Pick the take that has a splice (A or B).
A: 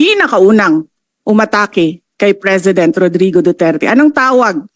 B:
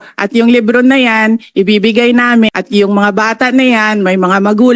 B